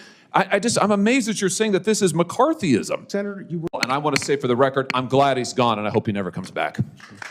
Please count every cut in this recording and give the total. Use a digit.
1